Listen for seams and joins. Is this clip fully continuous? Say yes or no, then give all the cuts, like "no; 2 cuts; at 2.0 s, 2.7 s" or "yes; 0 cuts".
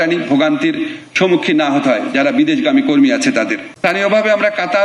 no; 1 cut; at 3.6 s